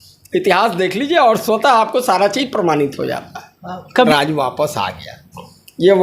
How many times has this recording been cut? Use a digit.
1